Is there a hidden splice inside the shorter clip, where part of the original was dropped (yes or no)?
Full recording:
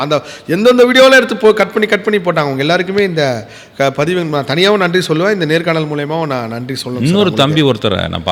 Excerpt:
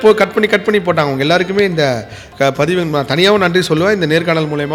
no